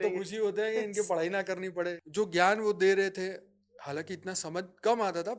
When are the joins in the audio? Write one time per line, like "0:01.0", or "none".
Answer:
0:02.0